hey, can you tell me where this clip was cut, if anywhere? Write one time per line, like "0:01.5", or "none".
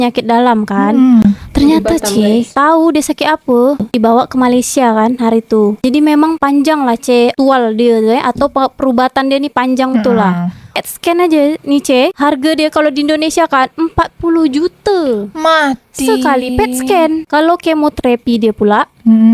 0:03.9
0:10.8

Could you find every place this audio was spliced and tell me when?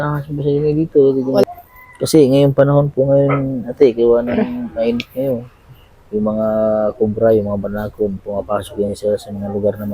0:01.4

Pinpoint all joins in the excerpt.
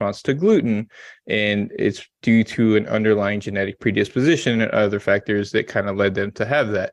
none

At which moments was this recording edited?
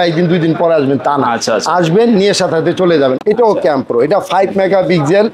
0:03.2

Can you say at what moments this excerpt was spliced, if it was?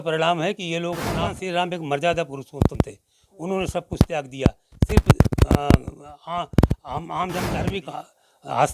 0:01.1
0:07.6

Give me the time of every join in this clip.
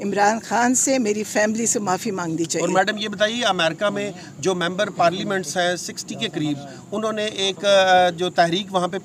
none

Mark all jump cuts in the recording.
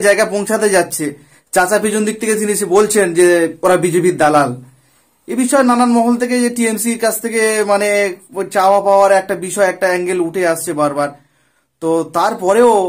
none

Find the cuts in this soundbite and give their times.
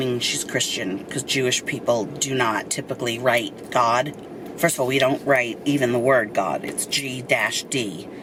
none

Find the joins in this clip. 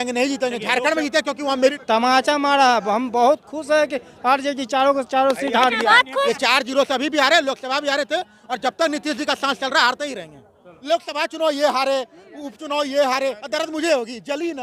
0:01.8
0:06.3
0:10.7

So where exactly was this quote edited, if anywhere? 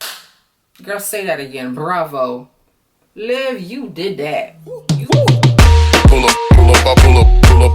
0:04.9

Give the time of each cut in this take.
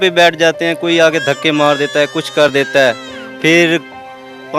none

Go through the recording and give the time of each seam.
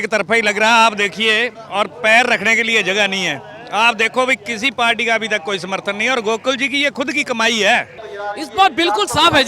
0:08.0

